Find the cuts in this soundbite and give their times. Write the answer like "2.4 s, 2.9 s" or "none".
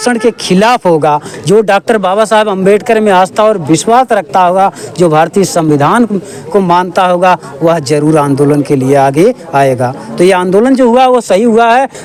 none